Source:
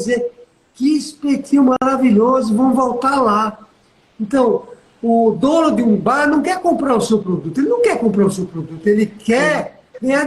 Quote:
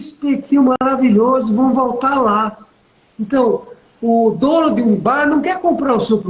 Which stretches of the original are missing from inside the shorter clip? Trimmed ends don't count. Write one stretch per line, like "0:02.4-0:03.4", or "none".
none

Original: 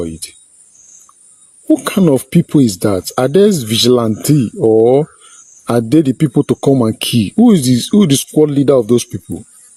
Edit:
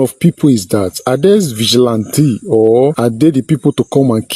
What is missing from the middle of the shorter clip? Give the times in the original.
0:05.1-0:05.7

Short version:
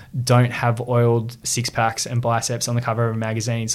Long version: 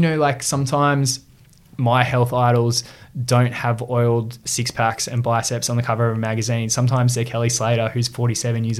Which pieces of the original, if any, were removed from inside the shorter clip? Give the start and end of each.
none

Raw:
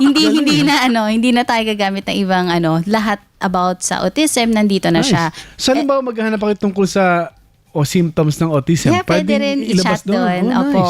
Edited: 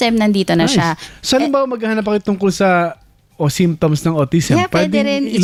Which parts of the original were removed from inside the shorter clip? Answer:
none

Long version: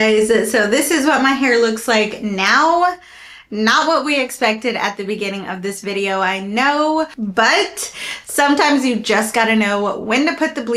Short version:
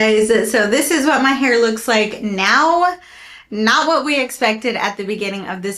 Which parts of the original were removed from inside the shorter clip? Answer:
none

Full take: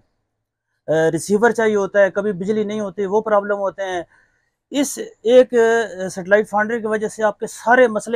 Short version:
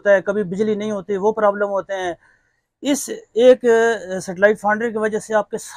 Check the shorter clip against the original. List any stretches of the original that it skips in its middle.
none

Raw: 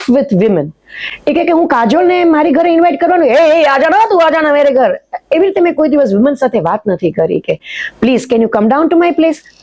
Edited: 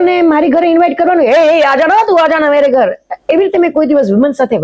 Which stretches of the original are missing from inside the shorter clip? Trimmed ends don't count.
none

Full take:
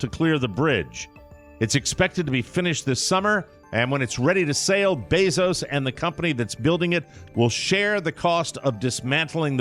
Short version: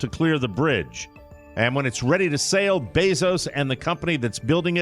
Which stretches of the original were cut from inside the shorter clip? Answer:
0:01.4-0:03.6

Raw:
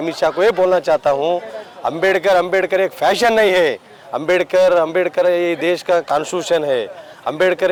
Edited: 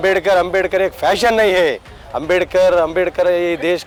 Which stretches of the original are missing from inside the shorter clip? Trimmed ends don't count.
none

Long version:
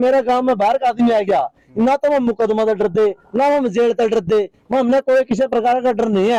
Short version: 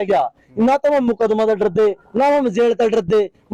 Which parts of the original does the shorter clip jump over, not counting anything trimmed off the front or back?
none

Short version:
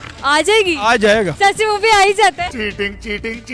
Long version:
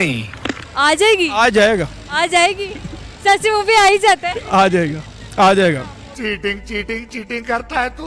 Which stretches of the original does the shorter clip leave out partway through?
0:01.9-0:03.2
0:04.3-0:06.1

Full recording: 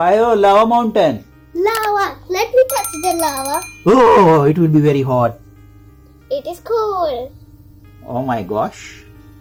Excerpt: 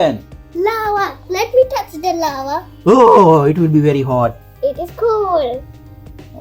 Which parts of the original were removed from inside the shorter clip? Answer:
0:05.5-0:06.1

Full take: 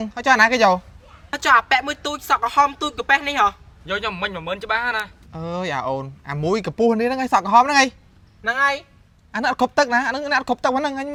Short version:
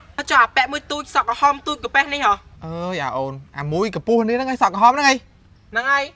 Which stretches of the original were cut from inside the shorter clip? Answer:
0:03.7-0:05.3

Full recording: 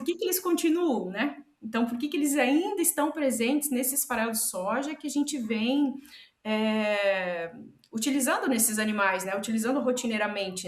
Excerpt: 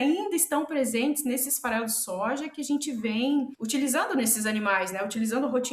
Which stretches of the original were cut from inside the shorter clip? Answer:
0:06.0-0:07.9

